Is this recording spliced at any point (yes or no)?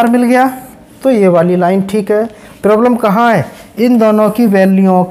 no